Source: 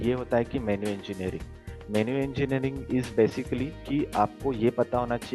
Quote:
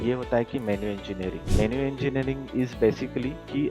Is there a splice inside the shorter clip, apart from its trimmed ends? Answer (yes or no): yes